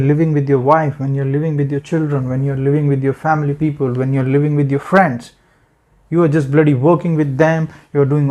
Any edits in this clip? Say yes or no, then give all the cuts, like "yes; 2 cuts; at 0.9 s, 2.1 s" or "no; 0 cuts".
no; 0 cuts